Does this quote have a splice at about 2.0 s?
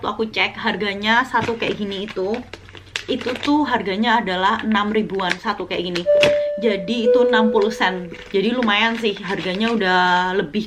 no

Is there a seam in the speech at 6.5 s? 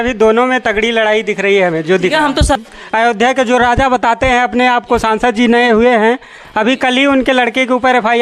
no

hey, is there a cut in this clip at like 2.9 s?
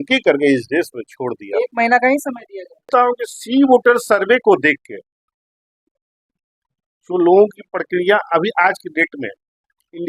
yes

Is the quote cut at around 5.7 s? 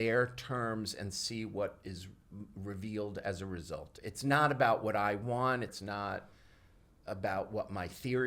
yes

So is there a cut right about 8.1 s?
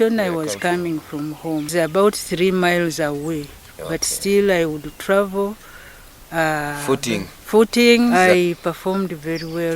yes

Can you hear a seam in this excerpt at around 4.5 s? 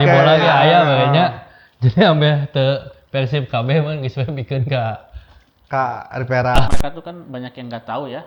no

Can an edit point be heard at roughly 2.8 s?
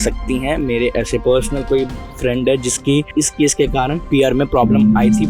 no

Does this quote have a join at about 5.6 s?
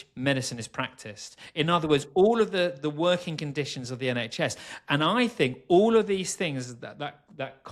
no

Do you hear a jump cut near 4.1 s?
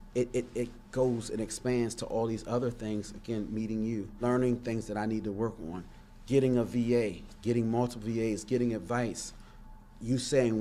yes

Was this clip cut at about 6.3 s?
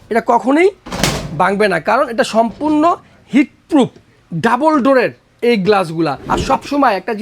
yes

